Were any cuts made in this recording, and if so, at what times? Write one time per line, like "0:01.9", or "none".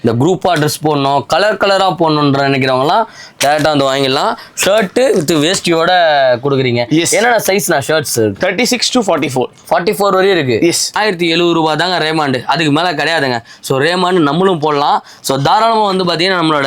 0:10.9